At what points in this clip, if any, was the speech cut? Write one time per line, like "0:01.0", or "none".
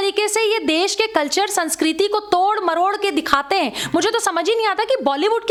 none